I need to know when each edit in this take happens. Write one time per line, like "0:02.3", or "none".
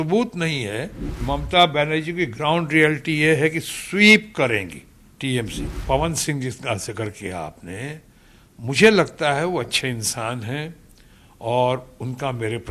0:01.2
0:05.6